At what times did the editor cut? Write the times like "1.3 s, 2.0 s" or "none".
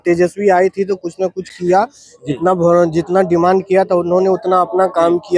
none